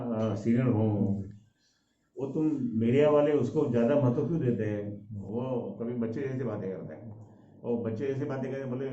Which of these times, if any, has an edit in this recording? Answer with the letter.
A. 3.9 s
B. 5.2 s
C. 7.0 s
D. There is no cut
B